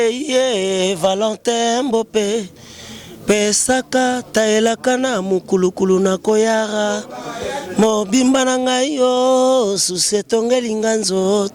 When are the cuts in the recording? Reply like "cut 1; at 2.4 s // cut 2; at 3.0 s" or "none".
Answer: none